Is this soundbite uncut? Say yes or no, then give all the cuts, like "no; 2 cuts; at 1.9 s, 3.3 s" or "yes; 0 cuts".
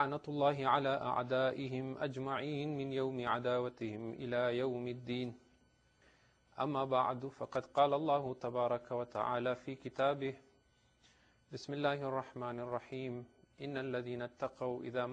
yes; 0 cuts